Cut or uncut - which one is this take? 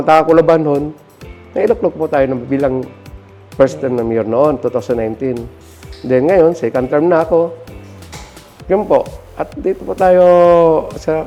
uncut